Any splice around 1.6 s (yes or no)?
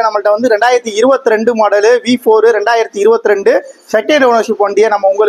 no